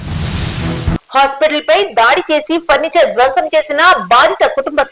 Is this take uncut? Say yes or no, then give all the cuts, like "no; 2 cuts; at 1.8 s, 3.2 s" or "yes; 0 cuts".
yes; 0 cuts